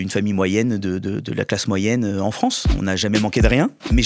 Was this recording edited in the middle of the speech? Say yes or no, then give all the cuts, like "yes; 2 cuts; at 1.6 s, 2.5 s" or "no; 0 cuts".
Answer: yes; 1 cut; at 2.7 s